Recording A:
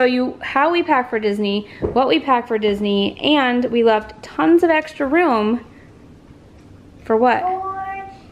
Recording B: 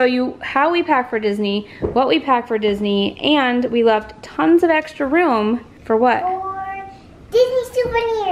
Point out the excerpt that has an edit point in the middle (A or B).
B